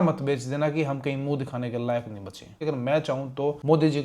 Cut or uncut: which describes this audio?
cut